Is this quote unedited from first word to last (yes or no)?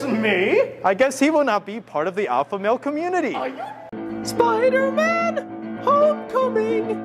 no